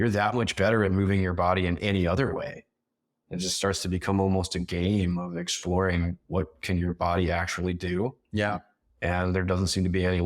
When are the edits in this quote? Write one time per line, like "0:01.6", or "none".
none